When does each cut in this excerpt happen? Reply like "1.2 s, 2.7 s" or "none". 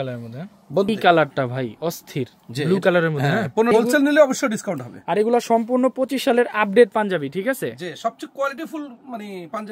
0.9 s, 3.7 s